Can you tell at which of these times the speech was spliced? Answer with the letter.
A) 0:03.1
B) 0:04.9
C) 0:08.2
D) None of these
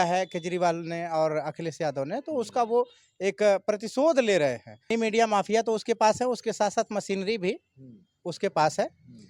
B